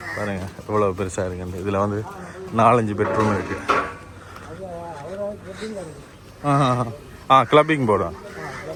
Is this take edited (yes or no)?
no